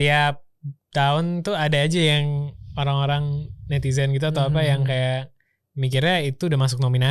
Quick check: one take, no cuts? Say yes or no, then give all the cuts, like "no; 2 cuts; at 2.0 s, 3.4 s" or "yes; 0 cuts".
yes; 0 cuts